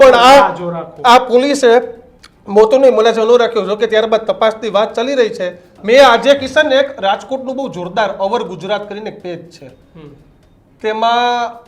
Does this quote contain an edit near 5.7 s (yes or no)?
yes